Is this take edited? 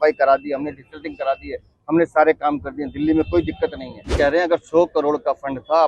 yes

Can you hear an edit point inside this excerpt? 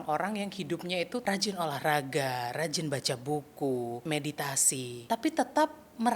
yes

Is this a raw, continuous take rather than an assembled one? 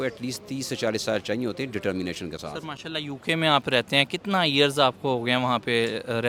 yes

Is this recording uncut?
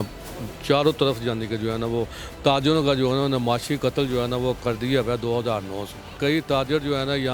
no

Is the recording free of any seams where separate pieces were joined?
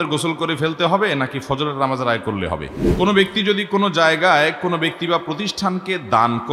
no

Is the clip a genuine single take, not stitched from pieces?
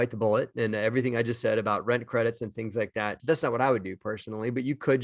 yes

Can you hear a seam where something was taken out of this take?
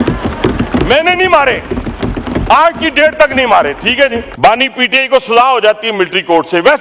yes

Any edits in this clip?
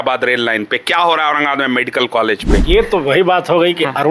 yes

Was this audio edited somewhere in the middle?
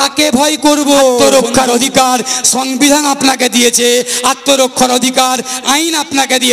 yes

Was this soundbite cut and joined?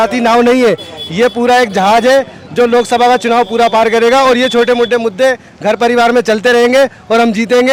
no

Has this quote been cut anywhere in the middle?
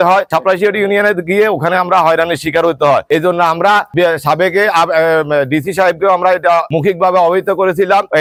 no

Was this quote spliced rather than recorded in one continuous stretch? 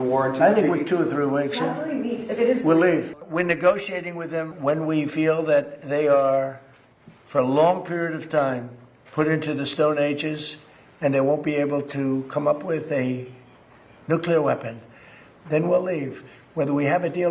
yes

